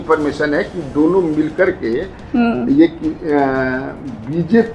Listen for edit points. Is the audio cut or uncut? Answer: uncut